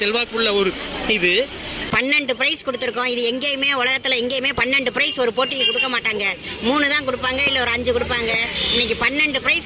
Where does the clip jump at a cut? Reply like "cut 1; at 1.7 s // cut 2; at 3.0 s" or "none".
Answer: cut 1; at 1.9 s